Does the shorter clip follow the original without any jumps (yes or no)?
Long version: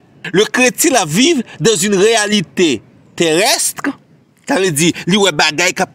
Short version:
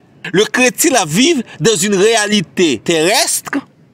no